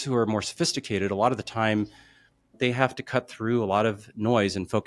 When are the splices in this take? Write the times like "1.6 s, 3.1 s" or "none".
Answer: 2.5 s